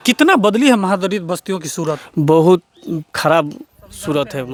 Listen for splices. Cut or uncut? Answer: uncut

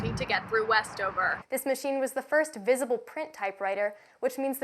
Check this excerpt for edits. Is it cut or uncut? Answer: cut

